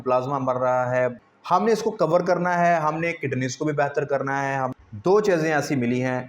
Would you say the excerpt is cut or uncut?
cut